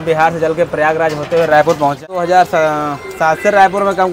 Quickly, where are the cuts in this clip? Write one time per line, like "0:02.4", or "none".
0:02.0